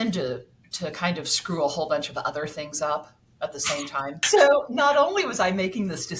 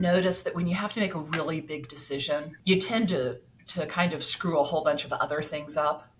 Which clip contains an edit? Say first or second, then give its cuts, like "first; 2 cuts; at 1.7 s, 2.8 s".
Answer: first; 1 cut; at 4.2 s